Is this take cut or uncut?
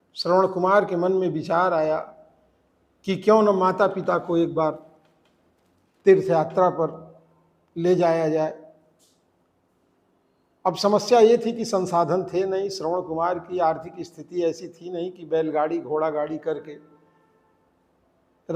uncut